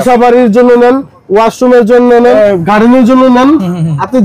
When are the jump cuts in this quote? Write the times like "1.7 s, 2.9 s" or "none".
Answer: 2.3 s